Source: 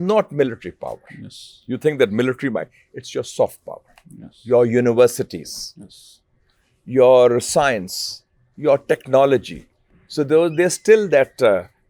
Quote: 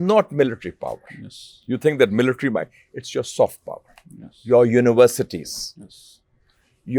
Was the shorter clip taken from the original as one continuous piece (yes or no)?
yes